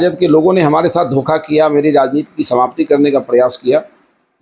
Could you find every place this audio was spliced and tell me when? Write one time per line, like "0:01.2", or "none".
none